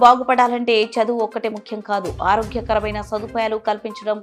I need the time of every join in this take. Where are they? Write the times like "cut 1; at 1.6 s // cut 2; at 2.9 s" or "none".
none